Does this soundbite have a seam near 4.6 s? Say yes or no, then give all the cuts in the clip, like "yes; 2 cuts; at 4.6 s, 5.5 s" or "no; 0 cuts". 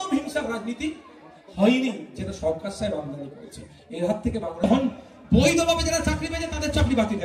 yes; 1 cut; at 4.6 s